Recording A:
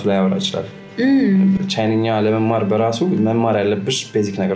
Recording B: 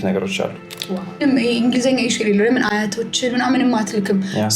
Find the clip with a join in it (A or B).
B